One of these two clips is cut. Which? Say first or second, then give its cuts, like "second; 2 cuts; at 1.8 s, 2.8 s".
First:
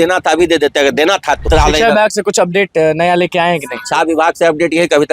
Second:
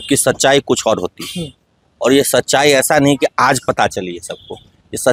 first; 1 cut; at 1.5 s